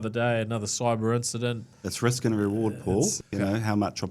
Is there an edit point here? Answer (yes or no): yes